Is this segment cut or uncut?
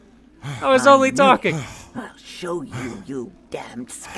cut